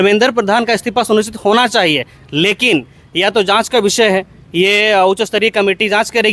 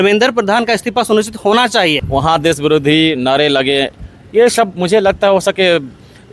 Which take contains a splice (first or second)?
second